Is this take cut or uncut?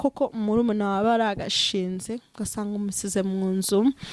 uncut